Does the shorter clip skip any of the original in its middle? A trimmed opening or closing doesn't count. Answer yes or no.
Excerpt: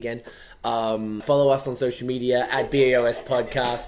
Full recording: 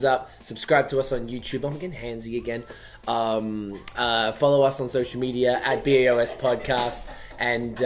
yes